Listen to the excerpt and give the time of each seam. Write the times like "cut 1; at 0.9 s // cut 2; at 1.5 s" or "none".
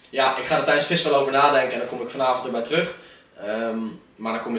none

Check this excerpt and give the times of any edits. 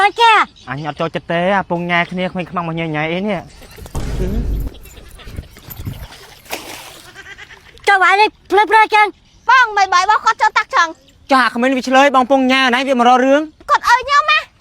cut 1; at 13.6 s

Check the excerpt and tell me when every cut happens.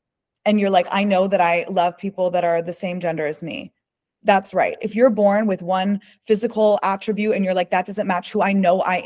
none

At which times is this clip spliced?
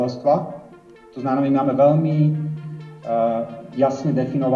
none

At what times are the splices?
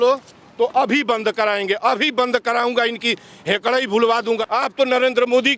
cut 1; at 4.4 s

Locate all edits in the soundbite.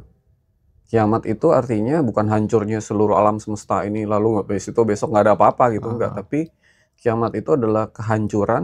none

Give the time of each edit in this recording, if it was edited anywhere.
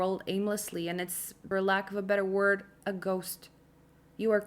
cut 1; at 1.4 s

